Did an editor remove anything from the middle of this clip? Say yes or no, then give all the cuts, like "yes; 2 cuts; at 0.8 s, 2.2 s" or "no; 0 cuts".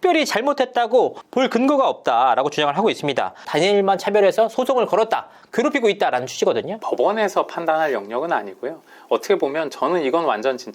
yes; 2 cuts; at 3.5 s, 6.7 s